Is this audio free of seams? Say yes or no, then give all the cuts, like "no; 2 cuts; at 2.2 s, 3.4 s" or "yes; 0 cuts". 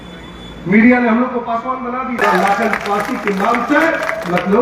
no; 1 cut; at 2.5 s